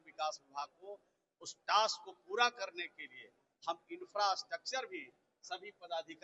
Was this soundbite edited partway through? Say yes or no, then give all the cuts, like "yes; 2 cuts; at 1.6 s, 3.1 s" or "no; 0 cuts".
no; 0 cuts